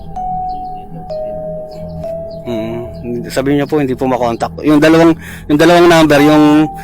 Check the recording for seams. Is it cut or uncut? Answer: cut